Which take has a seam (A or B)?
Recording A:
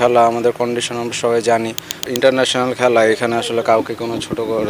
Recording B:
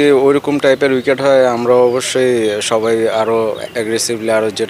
A